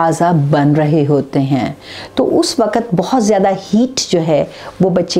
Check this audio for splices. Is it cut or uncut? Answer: uncut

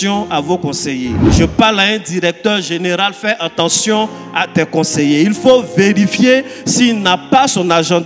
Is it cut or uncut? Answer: cut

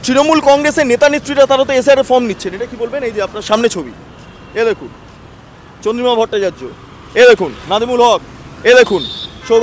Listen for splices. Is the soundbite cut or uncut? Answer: uncut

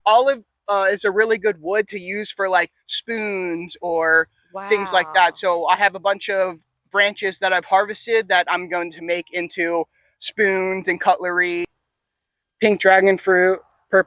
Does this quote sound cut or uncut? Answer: cut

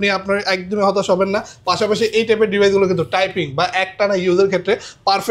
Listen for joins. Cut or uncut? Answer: uncut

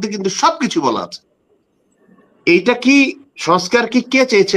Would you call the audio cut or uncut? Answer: uncut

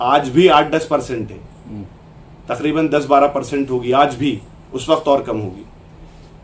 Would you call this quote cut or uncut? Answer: uncut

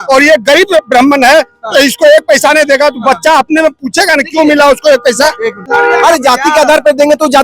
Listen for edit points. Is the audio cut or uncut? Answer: cut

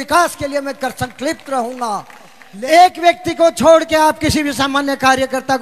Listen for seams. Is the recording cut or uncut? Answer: cut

